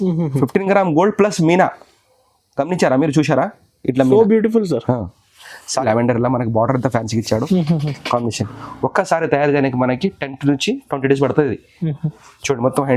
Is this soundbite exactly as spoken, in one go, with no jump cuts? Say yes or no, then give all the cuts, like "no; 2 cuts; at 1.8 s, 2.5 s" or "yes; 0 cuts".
no; 1 cut; at 5.8 s